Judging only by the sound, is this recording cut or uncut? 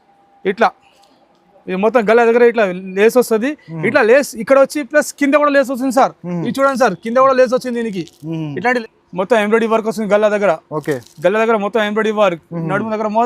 cut